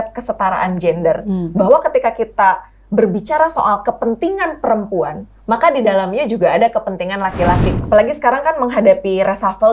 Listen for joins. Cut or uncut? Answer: cut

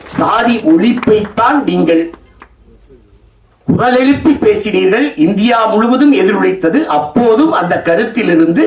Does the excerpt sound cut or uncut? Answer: uncut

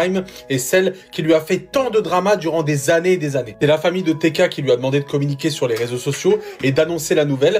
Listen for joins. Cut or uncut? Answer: uncut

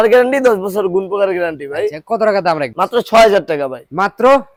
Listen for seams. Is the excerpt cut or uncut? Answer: uncut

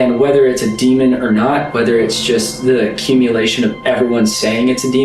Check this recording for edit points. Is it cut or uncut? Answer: uncut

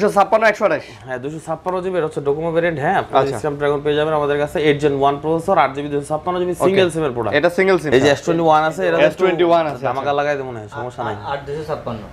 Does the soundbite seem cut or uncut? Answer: cut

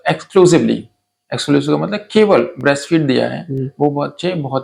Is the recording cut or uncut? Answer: uncut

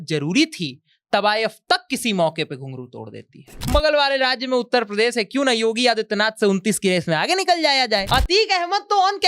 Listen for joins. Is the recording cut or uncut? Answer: cut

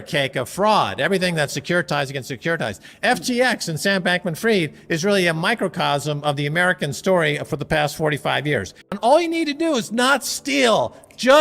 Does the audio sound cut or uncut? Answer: cut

